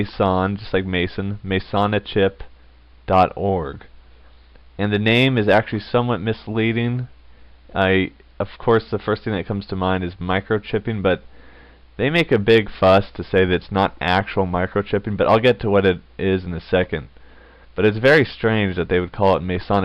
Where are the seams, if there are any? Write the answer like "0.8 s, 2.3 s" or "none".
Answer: 4.3 s